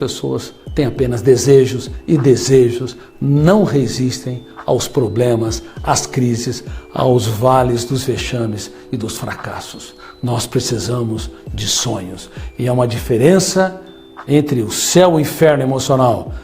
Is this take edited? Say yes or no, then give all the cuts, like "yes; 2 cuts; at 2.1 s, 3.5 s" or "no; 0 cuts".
yes; 1 cut; at 1.9 s